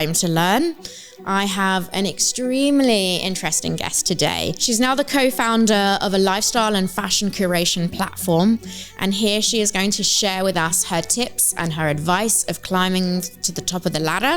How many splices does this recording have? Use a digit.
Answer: 1